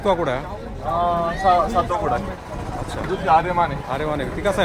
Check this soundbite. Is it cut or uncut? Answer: cut